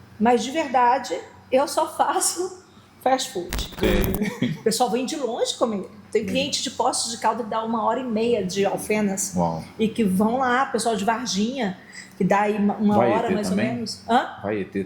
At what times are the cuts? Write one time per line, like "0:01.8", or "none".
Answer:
0:03.8